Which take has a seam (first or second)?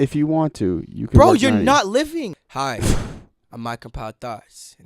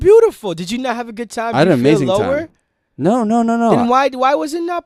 first